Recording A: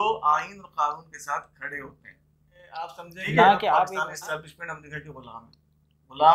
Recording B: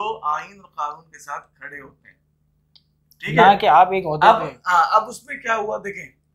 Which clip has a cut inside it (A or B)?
A